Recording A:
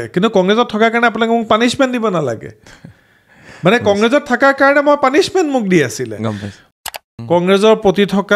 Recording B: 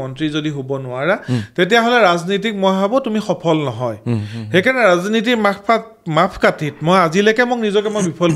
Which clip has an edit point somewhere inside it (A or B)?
A